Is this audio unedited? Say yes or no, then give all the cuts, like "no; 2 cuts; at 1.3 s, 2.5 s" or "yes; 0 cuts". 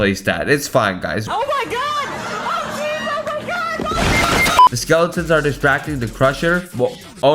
no; 1 cut; at 4.7 s